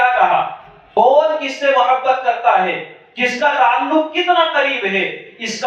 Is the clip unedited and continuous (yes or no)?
no